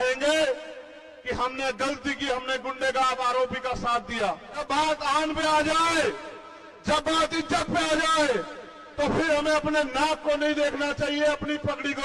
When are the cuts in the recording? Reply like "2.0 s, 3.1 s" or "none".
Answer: 4.6 s